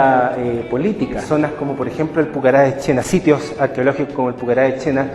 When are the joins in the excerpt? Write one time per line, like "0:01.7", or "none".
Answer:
0:01.2